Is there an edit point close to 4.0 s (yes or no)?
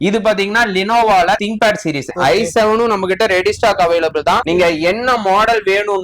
no